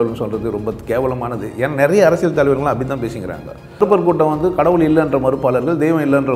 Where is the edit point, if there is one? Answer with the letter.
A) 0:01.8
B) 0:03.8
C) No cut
B